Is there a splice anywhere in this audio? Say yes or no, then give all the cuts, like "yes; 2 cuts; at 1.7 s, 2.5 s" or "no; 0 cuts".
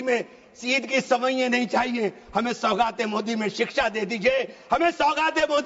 no; 0 cuts